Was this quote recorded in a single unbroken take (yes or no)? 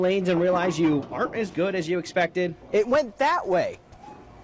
yes